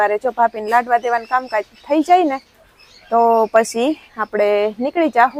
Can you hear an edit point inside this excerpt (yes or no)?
no